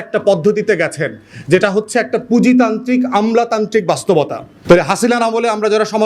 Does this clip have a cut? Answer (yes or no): yes